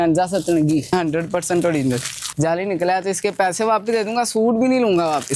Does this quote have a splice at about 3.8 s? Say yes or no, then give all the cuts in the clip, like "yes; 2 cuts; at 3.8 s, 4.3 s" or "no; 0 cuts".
no; 2 cuts; at 0.9 s, 2.2 s